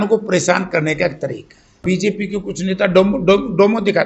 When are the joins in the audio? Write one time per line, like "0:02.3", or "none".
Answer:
0:01.8